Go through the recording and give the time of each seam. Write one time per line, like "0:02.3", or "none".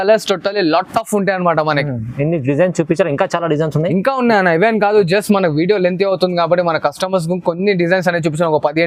none